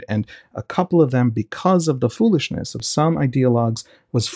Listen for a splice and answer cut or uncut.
cut